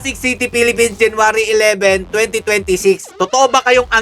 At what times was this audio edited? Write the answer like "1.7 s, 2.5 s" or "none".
3.1 s